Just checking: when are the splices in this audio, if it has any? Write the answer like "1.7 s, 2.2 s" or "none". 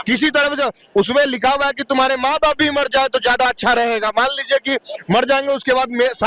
none